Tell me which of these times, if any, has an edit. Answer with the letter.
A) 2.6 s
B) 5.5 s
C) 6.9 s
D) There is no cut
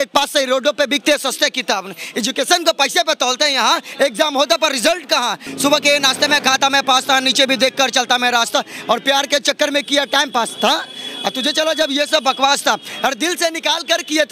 B